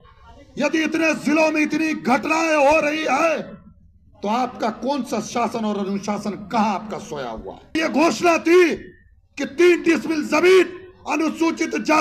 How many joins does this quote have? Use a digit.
1